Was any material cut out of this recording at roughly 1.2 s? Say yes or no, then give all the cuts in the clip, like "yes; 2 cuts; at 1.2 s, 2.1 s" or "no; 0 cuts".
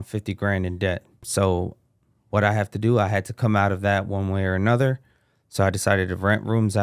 yes; 1 cut; at 1.2 s